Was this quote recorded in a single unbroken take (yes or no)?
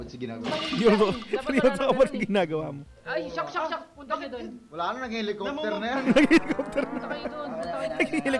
yes